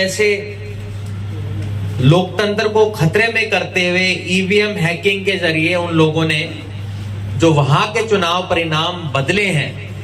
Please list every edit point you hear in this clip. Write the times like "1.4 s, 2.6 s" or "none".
none

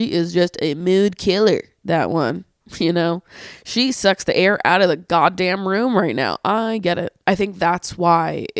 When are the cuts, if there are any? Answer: 7.1 s

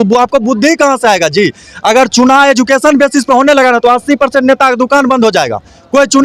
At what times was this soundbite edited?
none

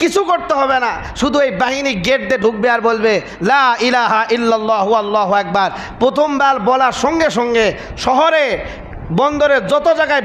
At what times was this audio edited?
none

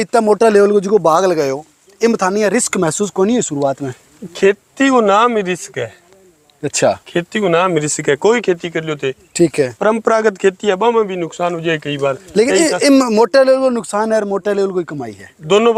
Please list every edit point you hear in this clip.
none

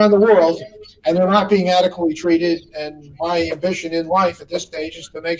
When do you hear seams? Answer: none

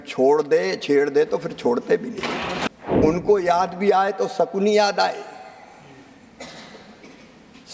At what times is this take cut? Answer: 2.7 s

